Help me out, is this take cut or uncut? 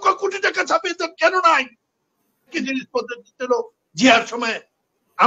cut